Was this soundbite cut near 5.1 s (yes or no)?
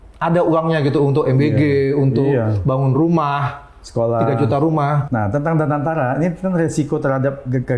yes